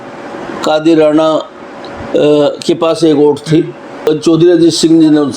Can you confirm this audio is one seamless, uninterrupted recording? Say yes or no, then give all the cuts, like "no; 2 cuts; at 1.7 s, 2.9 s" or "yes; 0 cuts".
no; 1 cut; at 4.1 s